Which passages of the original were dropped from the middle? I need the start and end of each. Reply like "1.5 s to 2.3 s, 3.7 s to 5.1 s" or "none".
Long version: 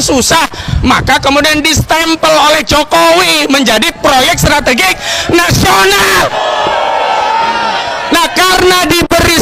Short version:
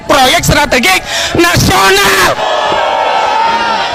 none